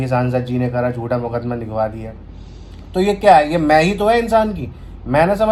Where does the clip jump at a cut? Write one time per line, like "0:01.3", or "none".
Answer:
none